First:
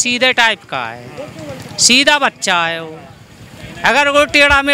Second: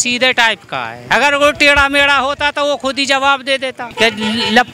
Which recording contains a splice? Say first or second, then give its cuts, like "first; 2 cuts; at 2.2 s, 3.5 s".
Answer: second; 2 cuts; at 0.9 s, 3.8 s